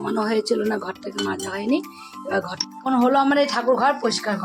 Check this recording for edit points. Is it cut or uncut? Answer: cut